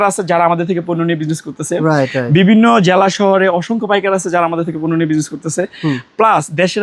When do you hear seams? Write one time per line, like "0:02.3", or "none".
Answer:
none